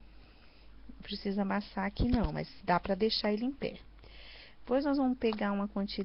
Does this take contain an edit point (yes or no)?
yes